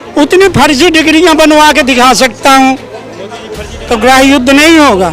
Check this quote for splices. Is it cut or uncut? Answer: cut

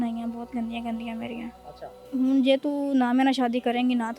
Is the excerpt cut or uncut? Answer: cut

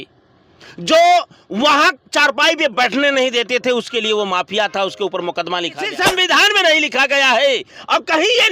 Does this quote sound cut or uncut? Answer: cut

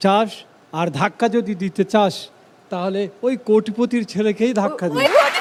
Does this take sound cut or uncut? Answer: uncut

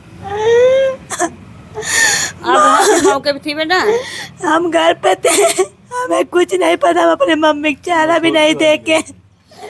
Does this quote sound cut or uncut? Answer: uncut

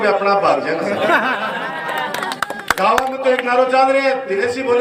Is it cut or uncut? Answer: uncut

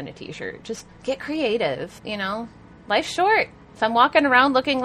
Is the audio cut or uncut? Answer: cut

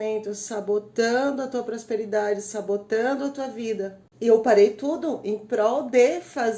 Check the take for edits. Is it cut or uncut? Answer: cut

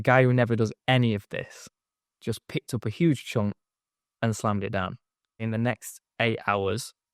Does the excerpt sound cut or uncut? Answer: cut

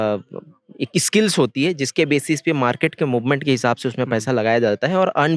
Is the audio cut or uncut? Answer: uncut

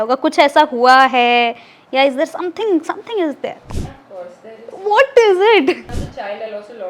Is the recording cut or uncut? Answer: cut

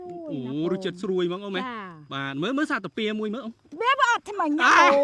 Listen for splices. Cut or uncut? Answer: uncut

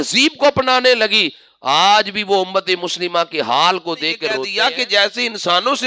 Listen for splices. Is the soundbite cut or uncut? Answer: cut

